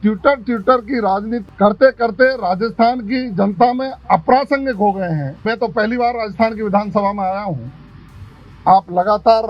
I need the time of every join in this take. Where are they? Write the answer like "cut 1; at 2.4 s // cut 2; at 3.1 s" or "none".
cut 1; at 1.4 s // cut 2; at 5.4 s

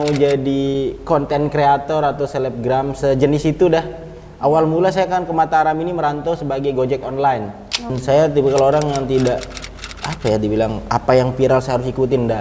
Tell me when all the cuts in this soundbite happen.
cut 1; at 8.0 s

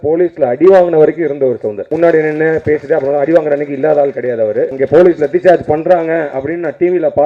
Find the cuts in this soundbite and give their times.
cut 1; at 1.9 s // cut 2; at 4.7 s

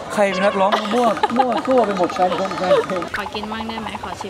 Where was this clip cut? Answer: cut 1; at 3.1 s

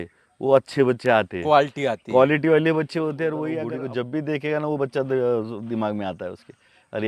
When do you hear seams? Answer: cut 1; at 3.6 s

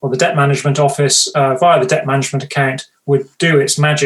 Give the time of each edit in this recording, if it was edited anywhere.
none

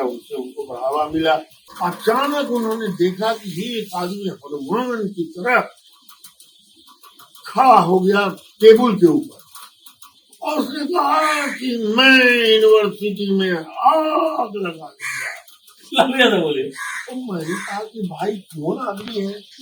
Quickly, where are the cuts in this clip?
cut 1; at 1.6 s

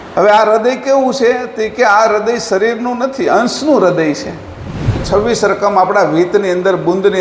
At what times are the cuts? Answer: cut 1; at 5.0 s

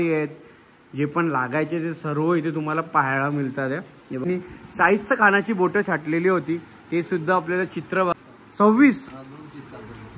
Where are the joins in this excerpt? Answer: cut 1; at 4.2 s // cut 2; at 8.1 s

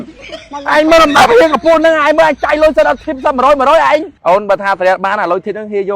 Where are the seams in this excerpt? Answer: cut 1; at 4.1 s

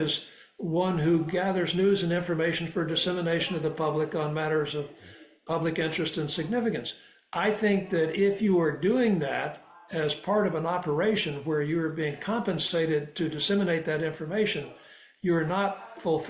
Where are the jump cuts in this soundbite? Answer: none

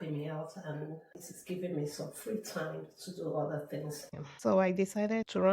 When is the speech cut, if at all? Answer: cut 1; at 4.2 s

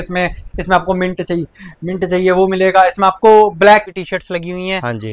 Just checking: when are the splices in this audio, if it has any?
cut 1; at 3.9 s

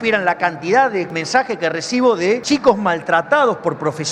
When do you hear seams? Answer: cut 1; at 1.1 s // cut 2; at 2.4 s

